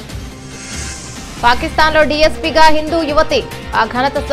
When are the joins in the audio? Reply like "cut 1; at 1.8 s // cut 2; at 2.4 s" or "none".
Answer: cut 1; at 1.2 s